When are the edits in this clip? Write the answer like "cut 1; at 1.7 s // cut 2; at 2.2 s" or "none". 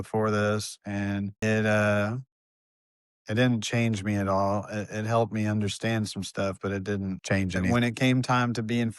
cut 1; at 1.4 s // cut 2; at 7.6 s